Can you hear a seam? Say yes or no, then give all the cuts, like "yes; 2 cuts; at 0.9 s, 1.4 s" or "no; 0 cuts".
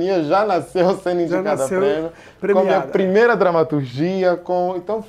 no; 0 cuts